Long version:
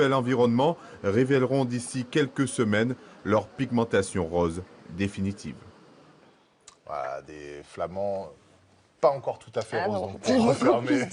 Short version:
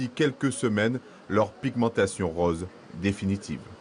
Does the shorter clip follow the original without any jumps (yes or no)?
yes